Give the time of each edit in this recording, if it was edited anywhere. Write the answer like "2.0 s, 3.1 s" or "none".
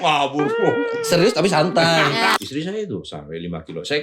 2.4 s